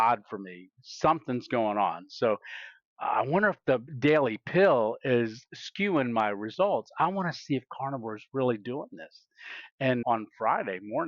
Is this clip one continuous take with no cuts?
no; 2 cuts; at 3.9 s, 10.0 s

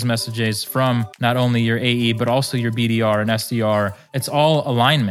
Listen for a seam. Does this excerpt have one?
yes; 2 cuts; at 1.1 s, 4.2 s

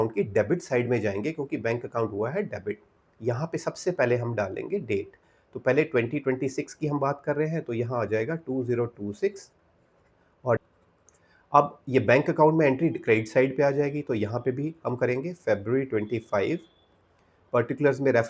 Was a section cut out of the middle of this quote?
yes; 1 cut; at 10.6 s

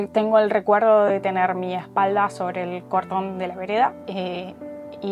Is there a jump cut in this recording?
no; 0 cuts

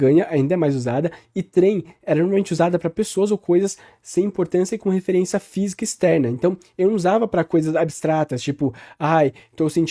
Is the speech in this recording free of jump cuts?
yes; 0 cuts

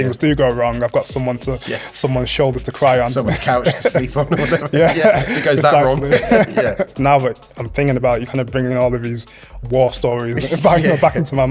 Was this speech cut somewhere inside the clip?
yes; 1 cut; at 6.9 s

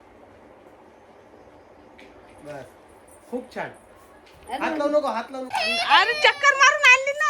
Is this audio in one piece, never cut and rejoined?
no; 1 cut; at 5.4 s

